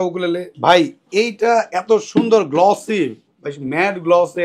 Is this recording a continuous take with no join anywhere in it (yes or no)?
yes